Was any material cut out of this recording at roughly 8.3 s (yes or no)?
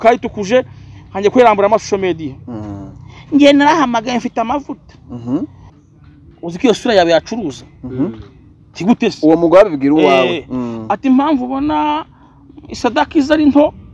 no